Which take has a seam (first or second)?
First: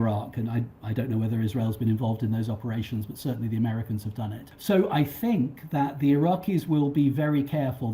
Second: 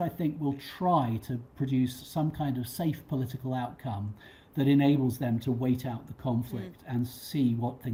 first